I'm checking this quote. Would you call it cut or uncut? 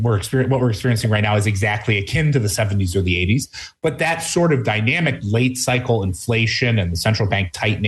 uncut